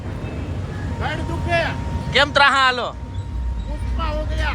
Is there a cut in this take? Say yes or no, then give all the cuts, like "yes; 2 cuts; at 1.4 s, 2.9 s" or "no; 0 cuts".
no; 0 cuts